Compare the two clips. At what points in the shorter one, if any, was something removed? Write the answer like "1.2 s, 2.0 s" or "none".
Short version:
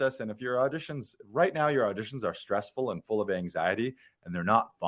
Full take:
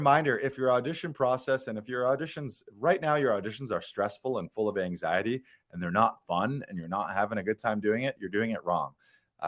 none